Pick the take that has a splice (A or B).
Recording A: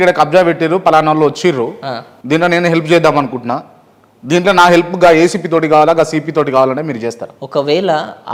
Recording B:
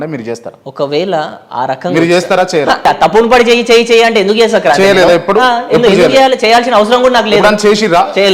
B